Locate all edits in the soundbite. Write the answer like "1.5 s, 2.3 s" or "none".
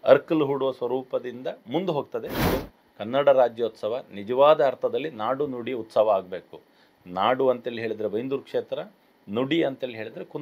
2.5 s